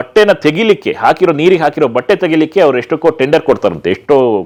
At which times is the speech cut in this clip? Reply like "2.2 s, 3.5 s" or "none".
none